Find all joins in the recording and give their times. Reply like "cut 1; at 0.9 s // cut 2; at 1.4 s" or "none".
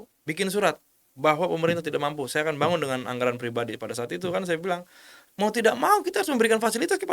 cut 1; at 5.2 s

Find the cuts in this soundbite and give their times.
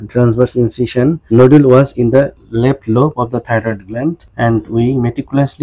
cut 1; at 1.2 s // cut 2; at 4.3 s

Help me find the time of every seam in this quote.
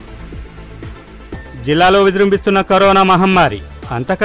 cut 1; at 1.1 s

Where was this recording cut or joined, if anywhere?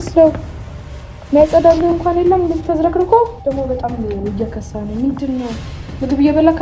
cut 1; at 3.4 s

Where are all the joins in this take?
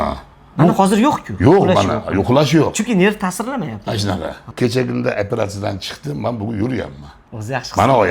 cut 1; at 4.5 s

